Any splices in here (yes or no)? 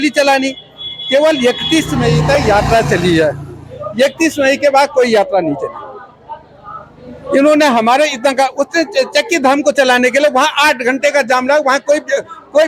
no